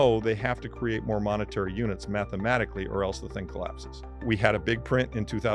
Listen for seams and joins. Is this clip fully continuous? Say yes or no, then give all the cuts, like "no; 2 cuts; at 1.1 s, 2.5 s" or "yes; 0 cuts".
no; 1 cut; at 4.2 s